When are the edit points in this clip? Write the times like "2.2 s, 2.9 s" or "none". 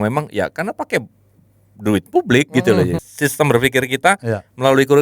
3.0 s